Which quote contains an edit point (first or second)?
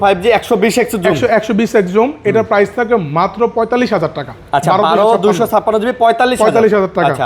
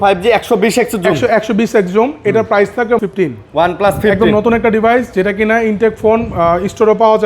second